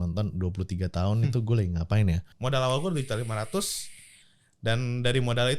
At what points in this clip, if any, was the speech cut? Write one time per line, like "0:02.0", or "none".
0:02.3